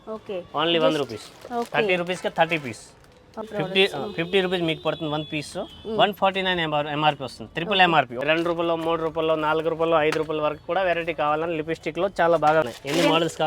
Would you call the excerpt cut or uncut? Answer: cut